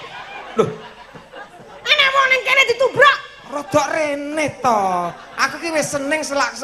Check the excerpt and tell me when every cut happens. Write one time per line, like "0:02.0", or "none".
none